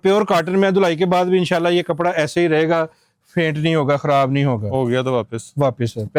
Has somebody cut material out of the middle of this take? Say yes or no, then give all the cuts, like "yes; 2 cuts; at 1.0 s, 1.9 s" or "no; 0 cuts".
no; 0 cuts